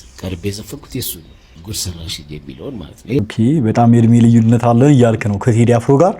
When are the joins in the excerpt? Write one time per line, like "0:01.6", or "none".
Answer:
0:01.6
0:03.2